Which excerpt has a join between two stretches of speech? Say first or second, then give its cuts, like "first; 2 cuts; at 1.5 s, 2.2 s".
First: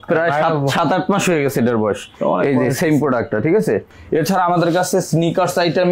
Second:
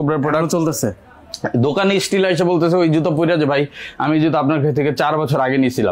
first; 1 cut; at 3.9 s